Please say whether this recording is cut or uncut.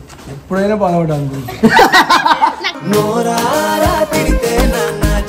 uncut